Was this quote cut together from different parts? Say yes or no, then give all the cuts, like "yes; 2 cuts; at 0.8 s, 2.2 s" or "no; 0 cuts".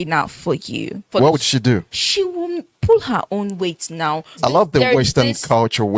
yes; 3 cuts; at 1.1 s, 2.0 s, 4.4 s